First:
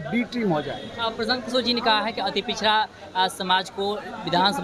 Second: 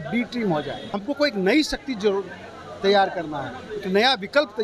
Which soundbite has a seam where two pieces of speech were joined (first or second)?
second